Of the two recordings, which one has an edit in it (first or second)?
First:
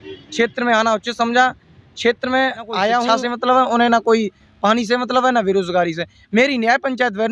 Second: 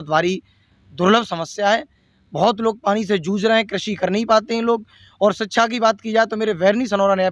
first